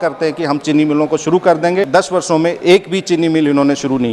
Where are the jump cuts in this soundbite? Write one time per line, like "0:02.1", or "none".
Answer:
0:01.9